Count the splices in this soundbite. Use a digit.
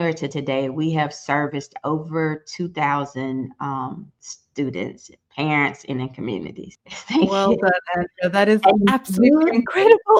0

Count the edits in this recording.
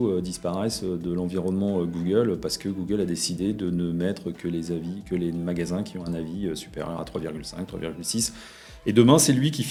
0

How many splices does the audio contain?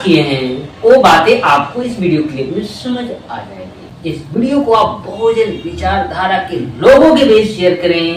1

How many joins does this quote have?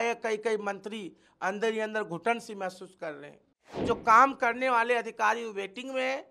1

